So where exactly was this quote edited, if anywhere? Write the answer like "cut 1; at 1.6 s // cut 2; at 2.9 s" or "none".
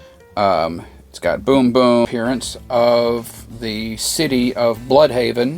cut 1; at 2.1 s